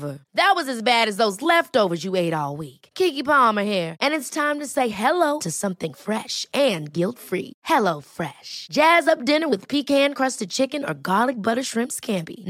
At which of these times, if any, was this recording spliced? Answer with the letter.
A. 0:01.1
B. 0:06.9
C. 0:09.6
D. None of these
D